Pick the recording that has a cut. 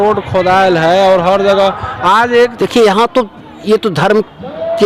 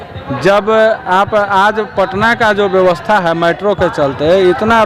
first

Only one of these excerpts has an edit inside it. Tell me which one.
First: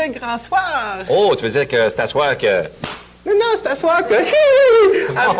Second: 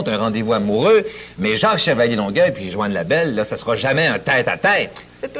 second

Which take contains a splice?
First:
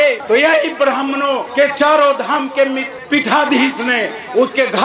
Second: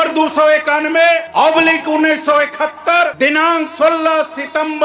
second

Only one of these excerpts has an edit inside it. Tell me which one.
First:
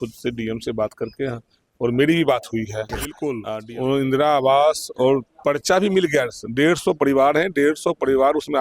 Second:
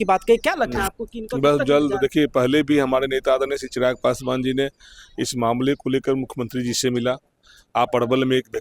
first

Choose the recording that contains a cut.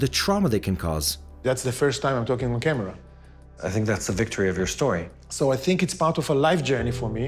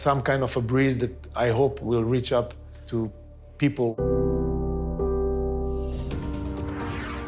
second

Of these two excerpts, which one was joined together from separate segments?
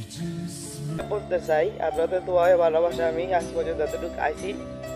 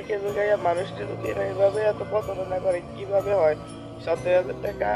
first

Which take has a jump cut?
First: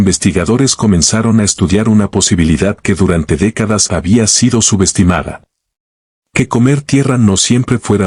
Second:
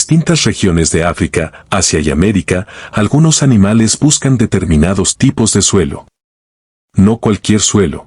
second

